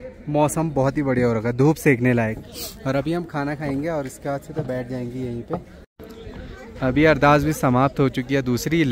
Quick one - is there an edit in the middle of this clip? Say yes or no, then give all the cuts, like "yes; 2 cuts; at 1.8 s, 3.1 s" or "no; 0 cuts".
yes; 1 cut; at 5.8 s